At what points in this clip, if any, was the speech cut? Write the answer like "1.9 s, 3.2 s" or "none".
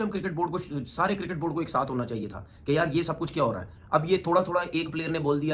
none